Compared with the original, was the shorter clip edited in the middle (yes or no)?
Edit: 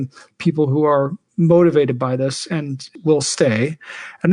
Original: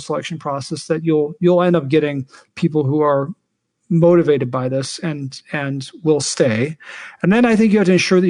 yes